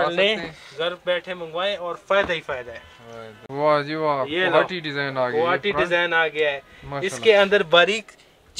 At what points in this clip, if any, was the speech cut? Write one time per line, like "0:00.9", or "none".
0:03.3